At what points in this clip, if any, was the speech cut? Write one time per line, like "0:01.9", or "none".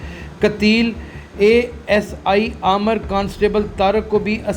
none